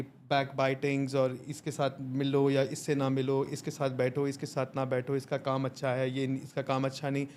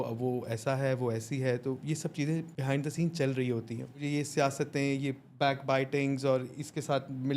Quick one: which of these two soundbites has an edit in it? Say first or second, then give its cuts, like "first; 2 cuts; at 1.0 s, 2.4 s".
second; 2 cuts; at 2.5 s, 4.0 s